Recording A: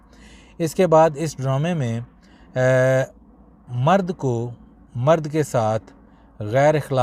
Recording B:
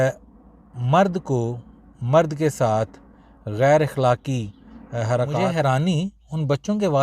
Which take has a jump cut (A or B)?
B